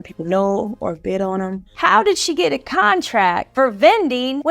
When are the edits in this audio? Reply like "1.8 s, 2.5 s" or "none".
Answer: 1.6 s